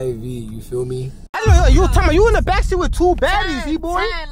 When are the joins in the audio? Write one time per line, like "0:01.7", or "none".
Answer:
0:01.0